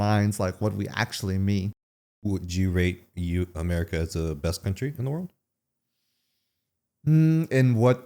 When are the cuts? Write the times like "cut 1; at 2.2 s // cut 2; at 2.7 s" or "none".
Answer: cut 1; at 1.7 s